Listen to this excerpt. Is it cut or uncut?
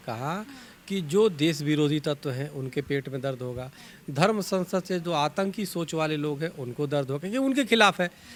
uncut